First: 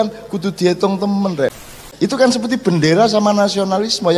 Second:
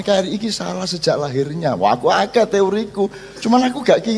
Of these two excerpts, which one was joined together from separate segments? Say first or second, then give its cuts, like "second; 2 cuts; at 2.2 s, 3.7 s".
first; 1 cut; at 1.5 s